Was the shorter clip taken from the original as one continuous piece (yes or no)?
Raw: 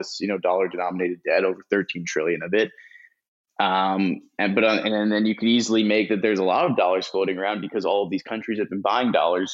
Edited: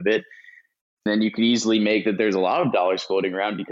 no